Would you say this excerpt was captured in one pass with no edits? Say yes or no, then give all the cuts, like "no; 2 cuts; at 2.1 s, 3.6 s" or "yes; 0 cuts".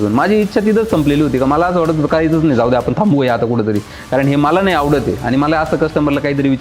yes; 0 cuts